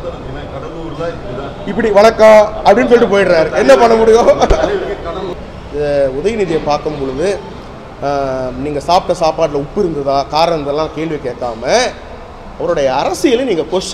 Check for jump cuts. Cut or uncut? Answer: cut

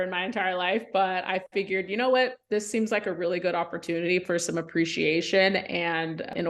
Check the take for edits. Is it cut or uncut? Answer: uncut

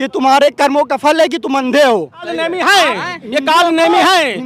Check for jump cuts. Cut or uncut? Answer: cut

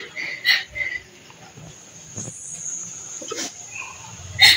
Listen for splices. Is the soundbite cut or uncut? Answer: uncut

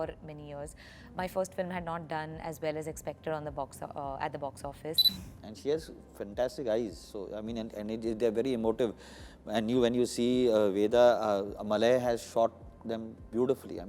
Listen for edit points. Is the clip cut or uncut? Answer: cut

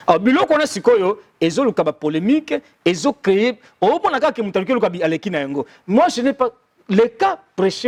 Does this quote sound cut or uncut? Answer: uncut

